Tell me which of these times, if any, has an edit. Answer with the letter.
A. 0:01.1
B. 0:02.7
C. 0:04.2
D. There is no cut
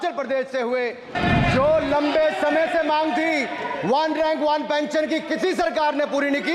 A